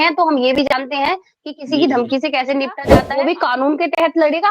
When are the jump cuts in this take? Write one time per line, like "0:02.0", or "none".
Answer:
0:02.9